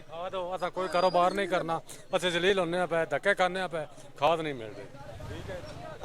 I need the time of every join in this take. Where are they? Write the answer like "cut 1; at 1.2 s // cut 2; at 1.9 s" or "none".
none